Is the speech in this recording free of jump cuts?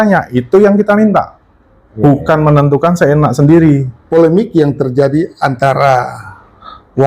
no; 1 cut; at 3.9 s

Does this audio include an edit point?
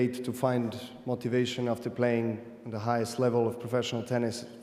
no; 0 cuts

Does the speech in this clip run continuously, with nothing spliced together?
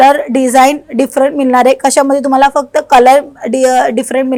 yes; 0 cuts

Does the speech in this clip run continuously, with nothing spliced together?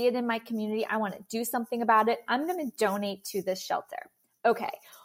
yes; 0 cuts

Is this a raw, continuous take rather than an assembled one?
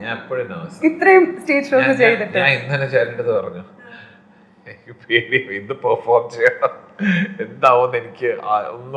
yes; 0 cuts

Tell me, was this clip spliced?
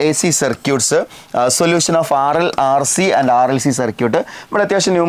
no; 0 cuts

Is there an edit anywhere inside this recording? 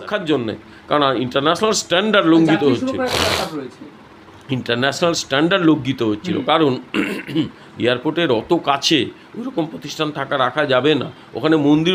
no; 0 cuts

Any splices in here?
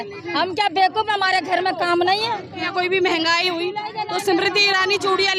yes; 1 cut; at 2.7 s

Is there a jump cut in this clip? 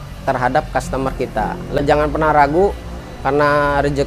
yes; 1 cut; at 1.8 s

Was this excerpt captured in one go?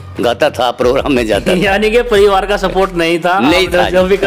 yes; 0 cuts

